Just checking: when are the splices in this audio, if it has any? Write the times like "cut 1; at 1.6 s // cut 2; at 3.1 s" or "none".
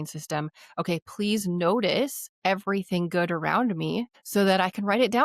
cut 1; at 2.2 s // cut 2; at 4.2 s